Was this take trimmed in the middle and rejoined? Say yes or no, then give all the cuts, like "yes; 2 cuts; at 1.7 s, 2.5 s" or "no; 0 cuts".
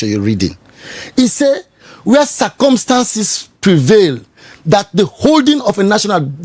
no; 0 cuts